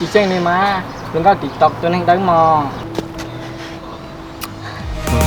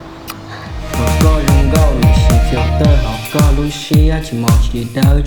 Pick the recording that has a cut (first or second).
first